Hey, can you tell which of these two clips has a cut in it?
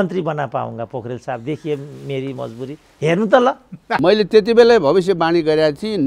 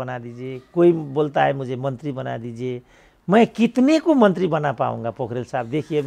first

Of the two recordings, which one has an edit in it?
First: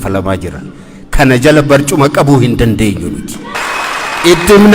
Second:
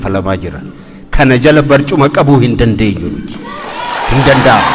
first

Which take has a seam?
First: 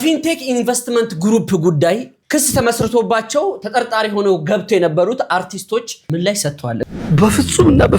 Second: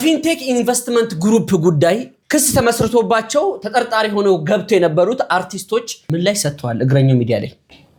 first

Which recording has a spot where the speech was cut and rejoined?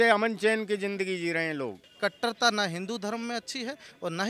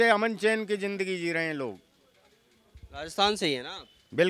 first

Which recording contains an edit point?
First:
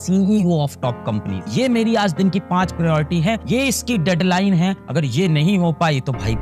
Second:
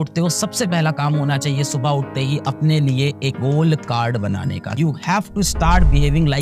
second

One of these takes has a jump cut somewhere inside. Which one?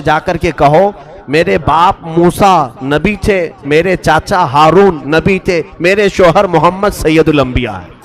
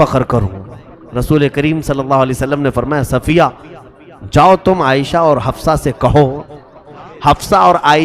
second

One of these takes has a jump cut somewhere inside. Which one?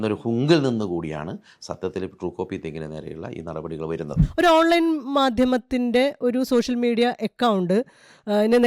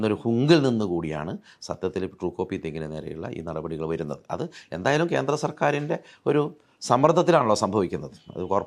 first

